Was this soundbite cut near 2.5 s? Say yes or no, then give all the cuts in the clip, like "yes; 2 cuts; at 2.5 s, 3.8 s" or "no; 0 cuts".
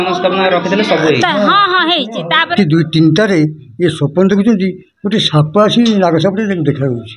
yes; 1 cut; at 2.5 s